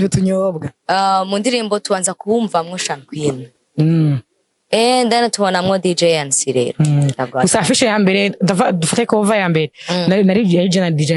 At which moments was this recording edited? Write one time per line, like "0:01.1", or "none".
none